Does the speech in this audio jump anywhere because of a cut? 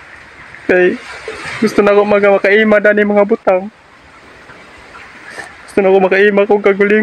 yes; 1 cut; at 5.0 s

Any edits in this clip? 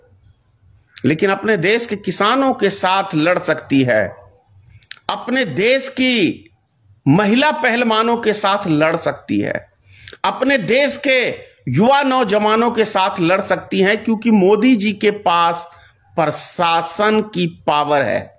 no; 0 cuts

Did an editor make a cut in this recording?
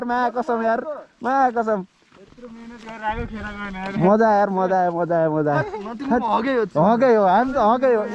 no; 0 cuts

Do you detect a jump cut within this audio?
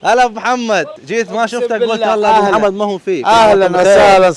yes; 1 cut; at 1.0 s

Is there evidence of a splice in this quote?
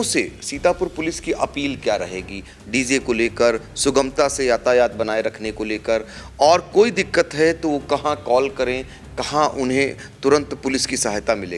no; 0 cuts

